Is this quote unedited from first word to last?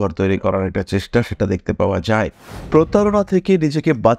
no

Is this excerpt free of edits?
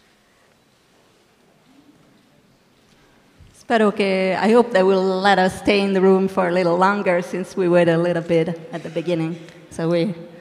yes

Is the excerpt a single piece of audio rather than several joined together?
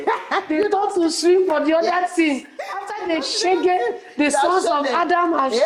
yes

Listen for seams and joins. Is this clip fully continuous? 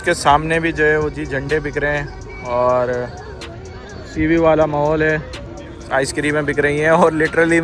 yes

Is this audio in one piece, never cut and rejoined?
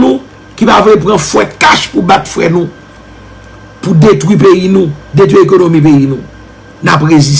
yes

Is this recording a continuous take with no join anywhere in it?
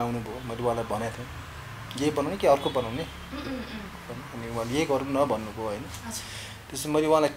yes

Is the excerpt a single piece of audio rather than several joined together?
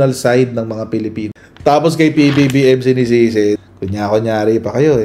no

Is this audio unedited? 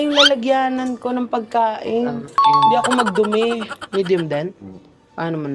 no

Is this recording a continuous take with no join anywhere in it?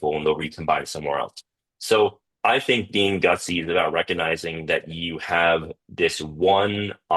no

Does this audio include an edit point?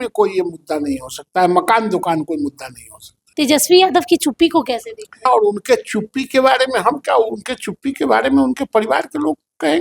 yes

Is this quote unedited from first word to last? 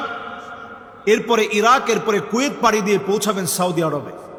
yes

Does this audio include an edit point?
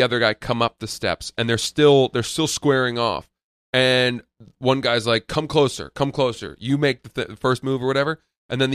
no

